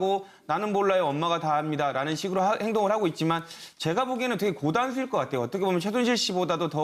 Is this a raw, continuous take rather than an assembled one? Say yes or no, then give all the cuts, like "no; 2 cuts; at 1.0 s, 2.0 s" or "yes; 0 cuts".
yes; 0 cuts